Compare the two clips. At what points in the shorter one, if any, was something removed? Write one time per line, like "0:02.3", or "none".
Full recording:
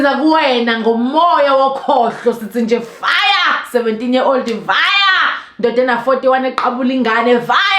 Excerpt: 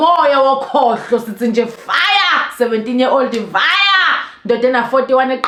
none